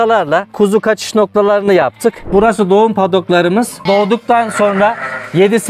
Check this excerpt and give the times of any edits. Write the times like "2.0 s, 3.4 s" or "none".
2.2 s

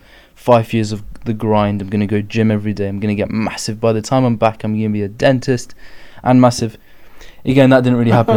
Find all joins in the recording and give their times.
none

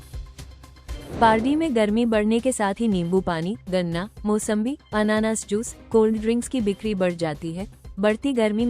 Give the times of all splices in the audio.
1.1 s

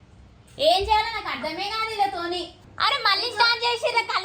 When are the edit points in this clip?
2.6 s

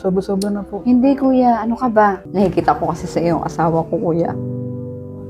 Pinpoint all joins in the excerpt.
2.2 s

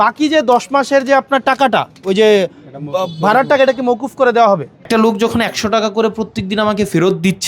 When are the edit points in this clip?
4.8 s

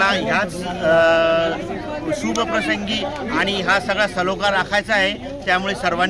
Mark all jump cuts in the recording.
none

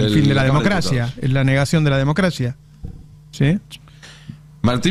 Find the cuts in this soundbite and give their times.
none

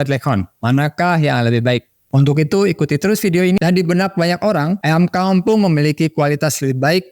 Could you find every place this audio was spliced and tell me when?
3.6 s

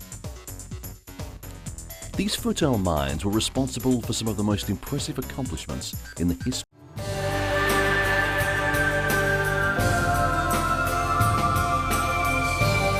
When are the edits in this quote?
none

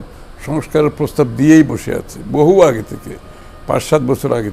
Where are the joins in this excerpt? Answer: none

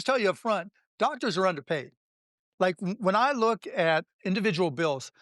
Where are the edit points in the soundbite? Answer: 4.1 s

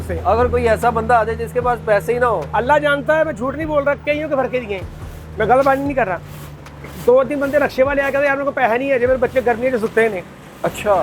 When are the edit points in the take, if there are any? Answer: none

